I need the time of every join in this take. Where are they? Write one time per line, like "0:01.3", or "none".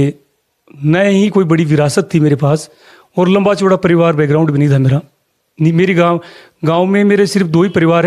none